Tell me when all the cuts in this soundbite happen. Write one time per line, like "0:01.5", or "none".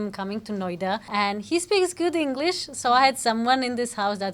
0:01.1